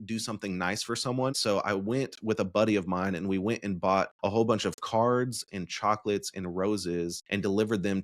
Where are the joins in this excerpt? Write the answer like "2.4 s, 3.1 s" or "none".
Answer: 1.4 s, 4.1 s, 7.2 s